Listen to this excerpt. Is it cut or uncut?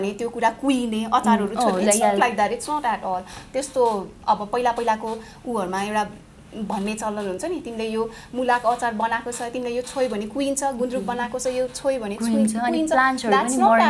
uncut